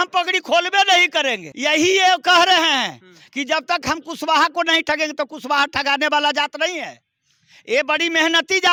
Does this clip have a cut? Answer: no; 0 cuts

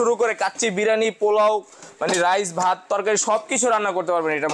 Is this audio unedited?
yes; 0 cuts

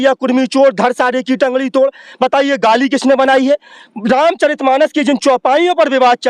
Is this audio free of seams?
yes; 0 cuts

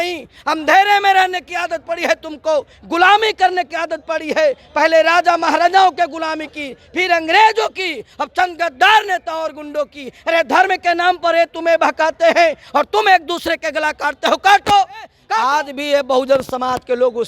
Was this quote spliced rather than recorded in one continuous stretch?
yes; 1 cut; at 15.2 s

